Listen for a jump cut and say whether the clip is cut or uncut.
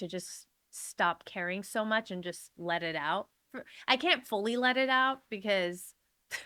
uncut